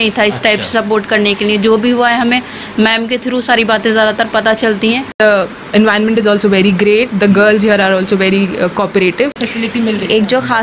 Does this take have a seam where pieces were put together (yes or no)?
yes